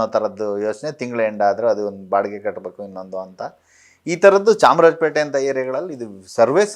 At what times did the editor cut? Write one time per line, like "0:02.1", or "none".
none